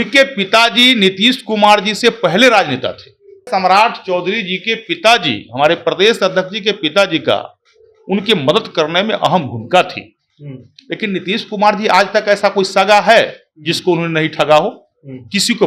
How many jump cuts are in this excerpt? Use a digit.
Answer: 1